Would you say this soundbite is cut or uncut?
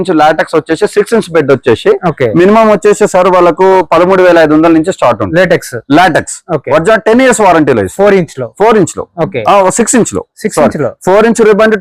uncut